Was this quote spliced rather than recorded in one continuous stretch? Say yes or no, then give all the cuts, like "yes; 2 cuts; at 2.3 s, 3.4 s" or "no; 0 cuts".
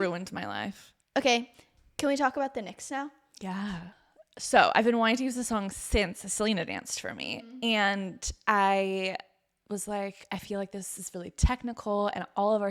yes; 2 cuts; at 0.9 s, 3.9 s